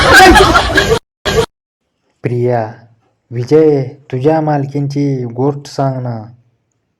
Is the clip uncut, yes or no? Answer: no